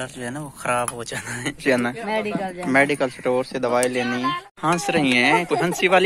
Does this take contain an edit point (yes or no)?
yes